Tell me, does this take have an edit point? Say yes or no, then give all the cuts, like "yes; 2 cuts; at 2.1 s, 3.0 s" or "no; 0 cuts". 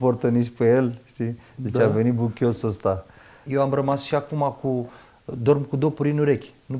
yes; 1 cut; at 3.4 s